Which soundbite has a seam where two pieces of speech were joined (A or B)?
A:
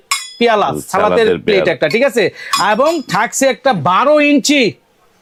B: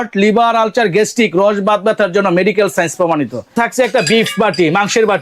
B